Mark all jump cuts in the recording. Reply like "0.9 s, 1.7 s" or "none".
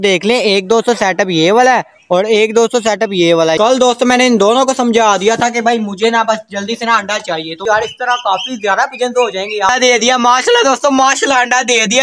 3.6 s, 7.6 s, 9.7 s

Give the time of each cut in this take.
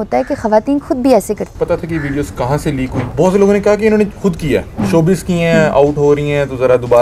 1.5 s, 3.0 s

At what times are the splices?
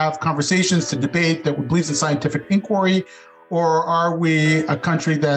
none

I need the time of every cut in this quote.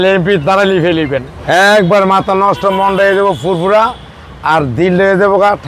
1.3 s

